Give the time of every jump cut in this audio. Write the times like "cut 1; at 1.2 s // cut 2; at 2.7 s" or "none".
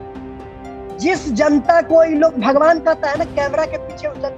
cut 1; at 1.0 s